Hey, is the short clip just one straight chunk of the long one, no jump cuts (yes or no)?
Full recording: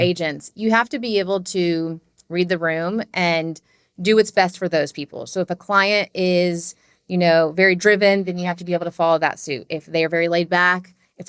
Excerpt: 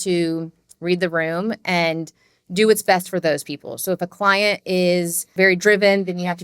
no